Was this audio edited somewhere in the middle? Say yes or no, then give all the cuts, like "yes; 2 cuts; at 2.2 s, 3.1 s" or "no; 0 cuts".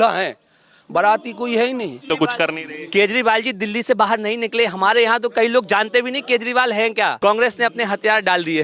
yes; 2 cuts; at 2.0 s, 7.2 s